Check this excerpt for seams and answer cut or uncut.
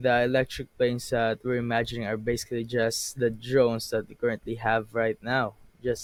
uncut